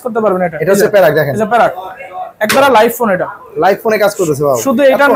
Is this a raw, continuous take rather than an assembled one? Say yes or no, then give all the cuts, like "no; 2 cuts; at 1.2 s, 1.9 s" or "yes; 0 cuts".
yes; 0 cuts